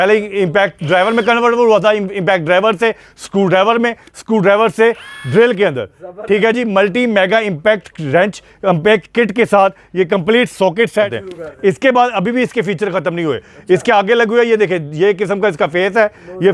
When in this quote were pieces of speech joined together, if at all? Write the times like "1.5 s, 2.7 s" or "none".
11.2 s